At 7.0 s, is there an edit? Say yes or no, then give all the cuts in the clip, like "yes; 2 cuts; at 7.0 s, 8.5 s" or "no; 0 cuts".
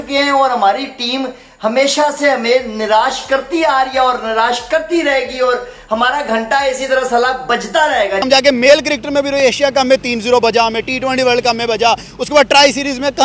no; 1 cut; at 8.2 s